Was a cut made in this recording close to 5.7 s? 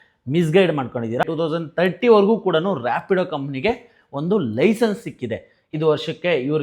yes; 2 cuts; at 1.2 s, 5.7 s

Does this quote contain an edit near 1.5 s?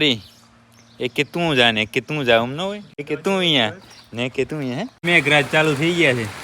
no; 2 cuts; at 3.0 s, 5.0 s

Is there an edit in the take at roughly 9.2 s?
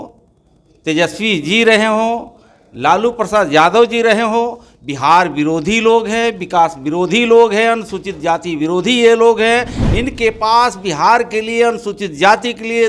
no; 0 cuts

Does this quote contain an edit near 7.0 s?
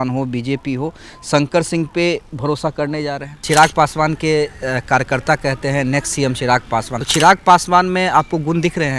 yes; 2 cuts; at 3.4 s, 7.0 s

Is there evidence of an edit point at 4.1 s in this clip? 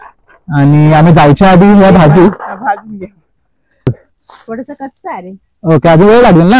yes; 1 cut; at 4.1 s

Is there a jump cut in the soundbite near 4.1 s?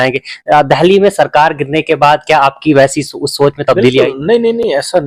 no; 0 cuts

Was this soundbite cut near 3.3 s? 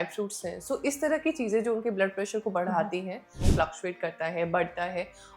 yes; 1 cut; at 3.3 s

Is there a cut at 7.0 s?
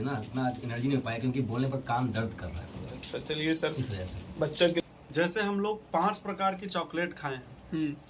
no; 1 cut; at 4.8 s

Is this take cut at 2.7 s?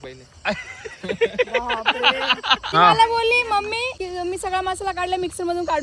yes; 2 cuts; at 2.7 s, 4.0 s

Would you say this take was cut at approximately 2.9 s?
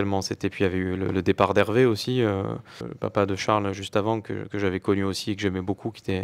yes; 1 cut; at 2.9 s

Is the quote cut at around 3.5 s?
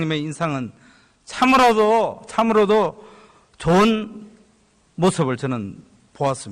yes; 1 cut; at 3.5 s

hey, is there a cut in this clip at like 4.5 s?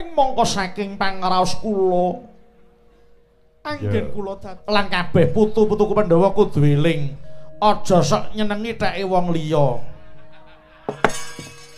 yes; 1 cut; at 4.5 s

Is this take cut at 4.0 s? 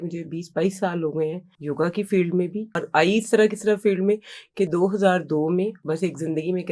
no; 3 cuts; at 1.5 s, 2.8 s, 5.8 s

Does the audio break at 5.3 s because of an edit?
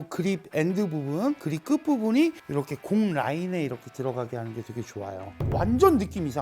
yes; 1 cut; at 5.3 s

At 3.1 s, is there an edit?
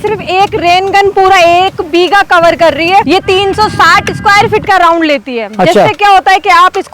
yes; 1 cut; at 3.1 s

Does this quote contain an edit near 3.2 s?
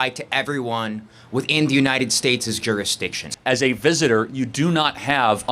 yes; 1 cut; at 3.2 s

